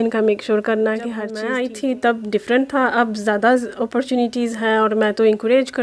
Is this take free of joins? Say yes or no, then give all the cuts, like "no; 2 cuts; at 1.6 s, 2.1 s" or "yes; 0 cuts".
no; 1 cut; at 1.3 s